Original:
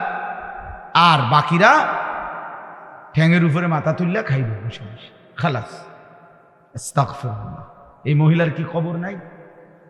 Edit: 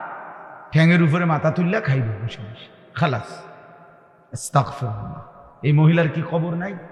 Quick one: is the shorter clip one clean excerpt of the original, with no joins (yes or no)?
yes